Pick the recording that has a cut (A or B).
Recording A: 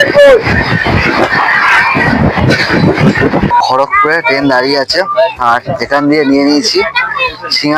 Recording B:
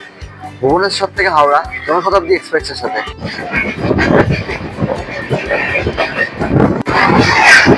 A